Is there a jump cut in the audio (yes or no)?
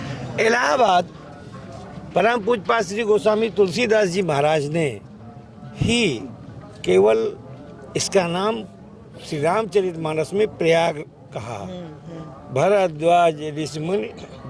no